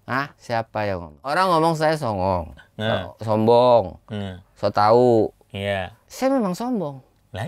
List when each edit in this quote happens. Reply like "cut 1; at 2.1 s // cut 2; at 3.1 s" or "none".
cut 1; at 1.1 s